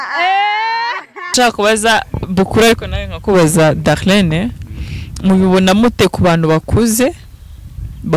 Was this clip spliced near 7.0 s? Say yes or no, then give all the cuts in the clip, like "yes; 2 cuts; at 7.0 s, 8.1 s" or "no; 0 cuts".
no; 1 cut; at 1.3 s